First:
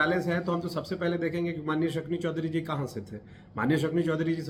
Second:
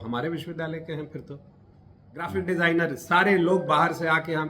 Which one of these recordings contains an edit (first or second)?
second